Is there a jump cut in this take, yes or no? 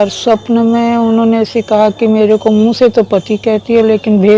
no